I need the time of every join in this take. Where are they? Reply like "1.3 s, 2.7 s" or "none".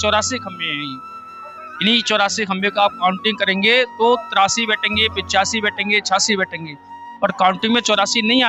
none